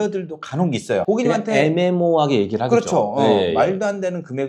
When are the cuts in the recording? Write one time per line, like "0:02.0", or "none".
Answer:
0:01.0